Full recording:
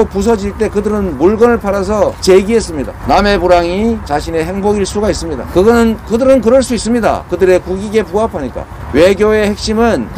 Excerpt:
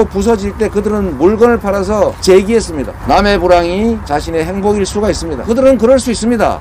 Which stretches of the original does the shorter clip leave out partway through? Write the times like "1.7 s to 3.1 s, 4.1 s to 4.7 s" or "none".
5.4 s to 6.0 s